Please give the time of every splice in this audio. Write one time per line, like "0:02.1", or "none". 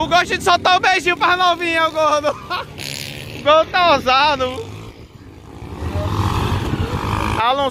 none